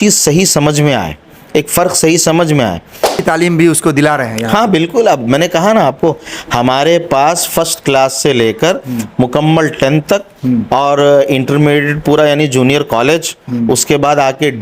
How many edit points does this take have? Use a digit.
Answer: 1